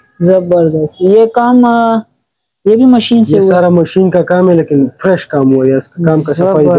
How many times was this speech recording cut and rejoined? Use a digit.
0